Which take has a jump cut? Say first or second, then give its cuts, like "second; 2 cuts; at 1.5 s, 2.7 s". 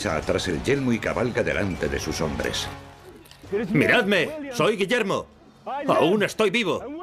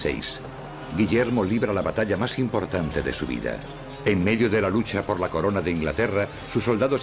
second; 1 cut; at 4.5 s